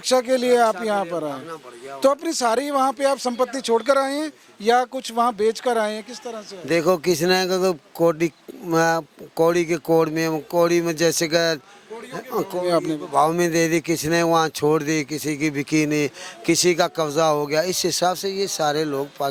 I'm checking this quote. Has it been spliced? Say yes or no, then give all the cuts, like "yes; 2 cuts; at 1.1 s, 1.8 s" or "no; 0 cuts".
no; 0 cuts